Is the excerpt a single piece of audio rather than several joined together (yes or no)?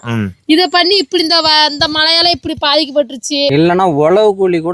no